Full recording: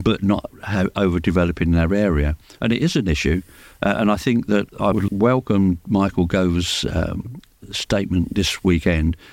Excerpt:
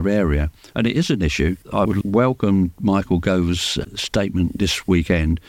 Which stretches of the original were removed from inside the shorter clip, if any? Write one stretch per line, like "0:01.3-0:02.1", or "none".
0:03.5-0:04.7
0:06.8-0:07.5

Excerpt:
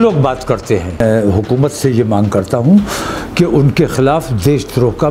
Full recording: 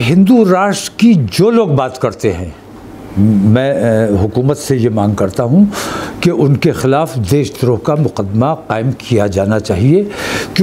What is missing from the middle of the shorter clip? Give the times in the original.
0:02.5-0:03.8

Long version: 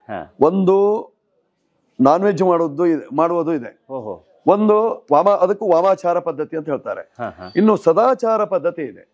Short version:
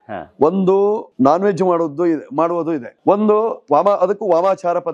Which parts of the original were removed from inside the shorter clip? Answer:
0:01.1-0:01.9
0:03.7-0:04.3

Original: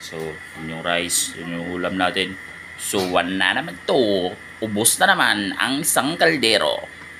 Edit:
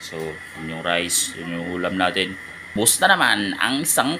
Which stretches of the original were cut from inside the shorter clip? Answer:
0:02.7-0:04.6

